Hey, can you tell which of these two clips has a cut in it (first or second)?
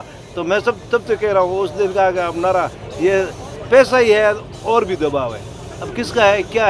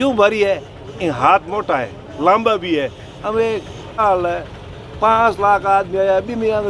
second